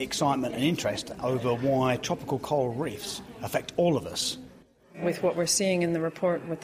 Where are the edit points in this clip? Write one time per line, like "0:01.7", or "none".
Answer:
0:05.0